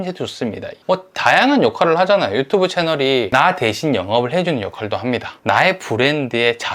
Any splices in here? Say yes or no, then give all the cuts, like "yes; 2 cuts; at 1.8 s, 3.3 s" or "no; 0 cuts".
yes; 1 cut; at 5.4 s